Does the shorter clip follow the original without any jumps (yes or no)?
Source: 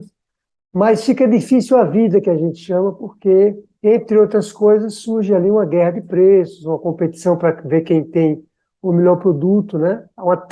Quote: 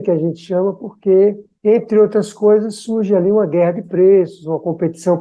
yes